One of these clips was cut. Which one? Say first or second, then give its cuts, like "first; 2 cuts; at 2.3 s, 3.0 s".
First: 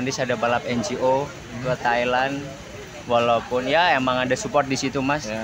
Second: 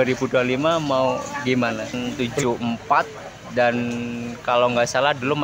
second; 1 cut; at 2.0 s